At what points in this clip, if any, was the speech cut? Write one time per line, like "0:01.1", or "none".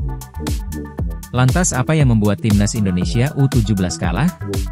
0:00.9